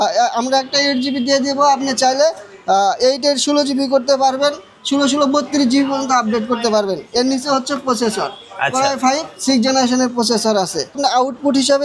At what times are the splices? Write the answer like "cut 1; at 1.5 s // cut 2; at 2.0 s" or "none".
cut 1; at 11.0 s